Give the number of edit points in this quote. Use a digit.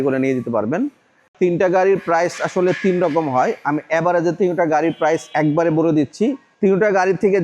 3